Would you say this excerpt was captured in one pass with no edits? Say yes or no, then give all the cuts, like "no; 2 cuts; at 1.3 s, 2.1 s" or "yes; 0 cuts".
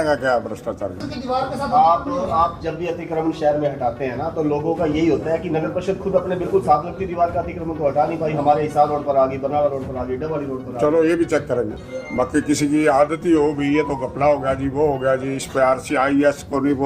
no; 2 cuts; at 1.1 s, 11.7 s